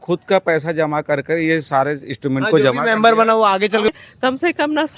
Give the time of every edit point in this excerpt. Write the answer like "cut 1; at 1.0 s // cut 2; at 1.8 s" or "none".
cut 1; at 3.9 s